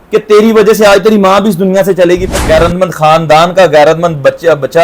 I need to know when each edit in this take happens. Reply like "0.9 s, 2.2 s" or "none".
2.3 s